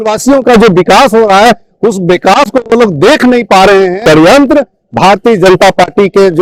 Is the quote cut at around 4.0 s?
yes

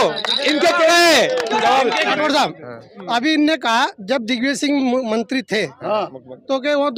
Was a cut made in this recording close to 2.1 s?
yes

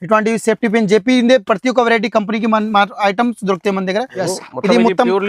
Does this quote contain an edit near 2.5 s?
no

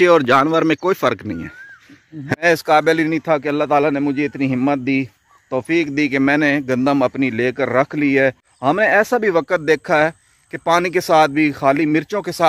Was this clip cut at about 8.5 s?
yes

